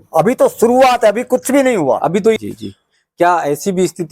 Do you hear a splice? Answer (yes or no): yes